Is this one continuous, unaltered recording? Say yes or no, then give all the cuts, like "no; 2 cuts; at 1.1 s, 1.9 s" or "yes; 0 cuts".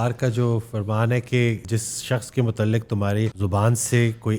no; 2 cuts; at 1.6 s, 3.4 s